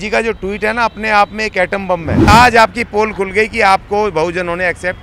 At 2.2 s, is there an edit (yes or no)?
yes